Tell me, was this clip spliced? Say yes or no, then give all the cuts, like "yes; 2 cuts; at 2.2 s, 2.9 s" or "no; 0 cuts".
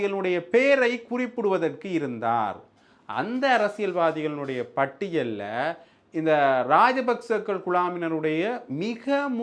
no; 0 cuts